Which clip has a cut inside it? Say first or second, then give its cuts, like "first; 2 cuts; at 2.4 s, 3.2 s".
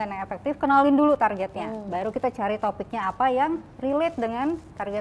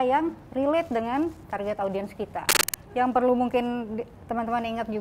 second; 1 cut; at 2.7 s